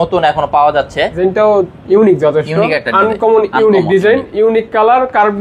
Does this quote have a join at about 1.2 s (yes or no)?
yes